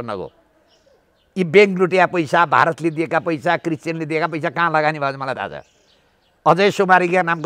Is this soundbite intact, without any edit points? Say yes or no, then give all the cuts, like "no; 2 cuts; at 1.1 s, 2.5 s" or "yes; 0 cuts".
yes; 0 cuts